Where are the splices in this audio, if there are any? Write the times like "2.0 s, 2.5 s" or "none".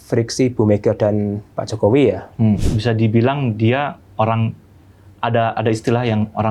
2.6 s